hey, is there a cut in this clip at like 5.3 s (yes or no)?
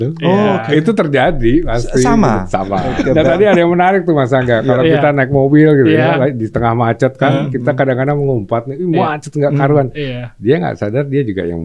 no